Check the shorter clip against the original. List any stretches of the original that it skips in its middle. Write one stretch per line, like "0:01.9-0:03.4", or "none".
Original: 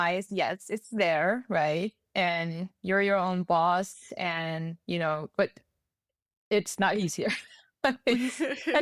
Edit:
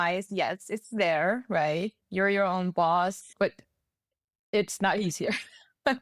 0:02.0-0:02.7
0:04.0-0:05.3